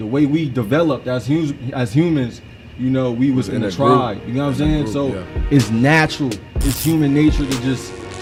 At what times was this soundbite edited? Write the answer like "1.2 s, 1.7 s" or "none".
none